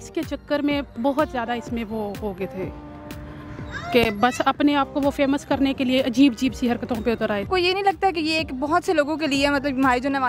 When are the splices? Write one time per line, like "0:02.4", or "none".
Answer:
none

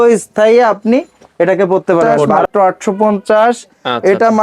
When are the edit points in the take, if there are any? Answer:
0:02.4

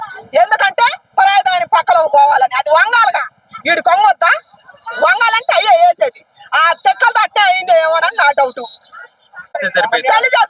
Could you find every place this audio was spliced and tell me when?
0:09.6

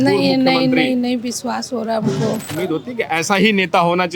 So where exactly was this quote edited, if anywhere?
0:02.5

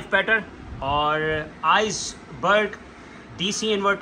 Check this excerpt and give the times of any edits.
none

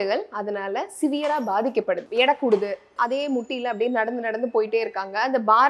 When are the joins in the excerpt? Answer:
0:02.1
0:02.9

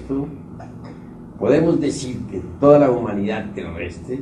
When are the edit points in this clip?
0:03.0

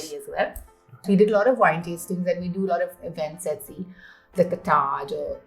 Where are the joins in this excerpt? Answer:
0:00.9

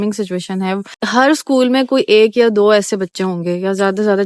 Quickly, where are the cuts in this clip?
0:00.9

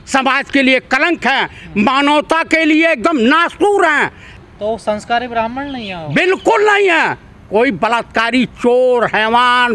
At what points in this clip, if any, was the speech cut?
none

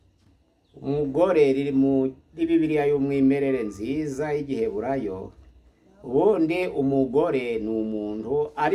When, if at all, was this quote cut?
none

